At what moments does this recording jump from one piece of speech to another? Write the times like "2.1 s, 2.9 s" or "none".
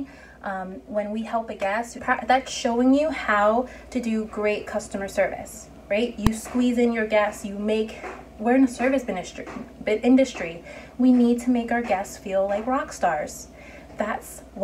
1.9 s